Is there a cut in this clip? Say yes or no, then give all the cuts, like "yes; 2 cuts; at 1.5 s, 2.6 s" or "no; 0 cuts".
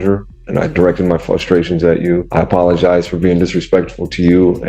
yes; 1 cut; at 2.3 s